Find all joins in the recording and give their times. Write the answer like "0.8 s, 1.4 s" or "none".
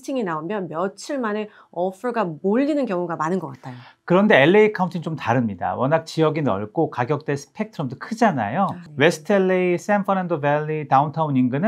none